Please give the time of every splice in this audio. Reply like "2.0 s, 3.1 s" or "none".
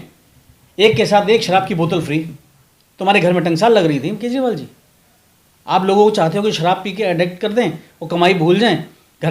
none